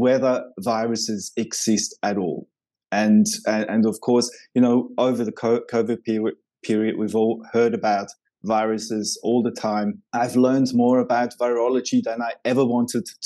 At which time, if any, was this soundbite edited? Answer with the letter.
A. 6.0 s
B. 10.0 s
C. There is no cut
B